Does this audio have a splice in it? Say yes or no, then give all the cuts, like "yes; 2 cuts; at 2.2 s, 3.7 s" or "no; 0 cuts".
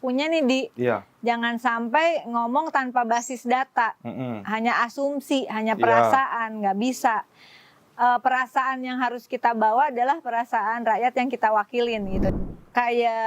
yes; 1 cut; at 12.3 s